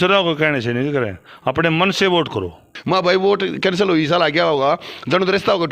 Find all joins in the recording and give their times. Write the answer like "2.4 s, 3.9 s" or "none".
2.7 s